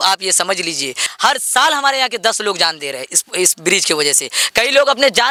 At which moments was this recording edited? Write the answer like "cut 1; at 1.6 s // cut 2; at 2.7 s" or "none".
none